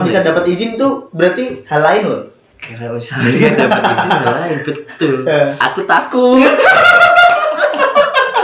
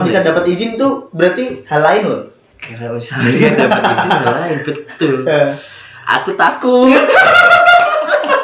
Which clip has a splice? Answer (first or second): first